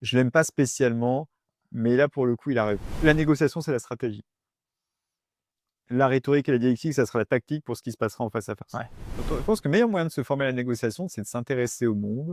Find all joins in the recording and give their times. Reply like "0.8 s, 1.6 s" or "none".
2.9 s, 9.2 s